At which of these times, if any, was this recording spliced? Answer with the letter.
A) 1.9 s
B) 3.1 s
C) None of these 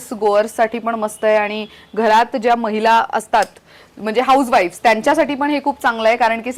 C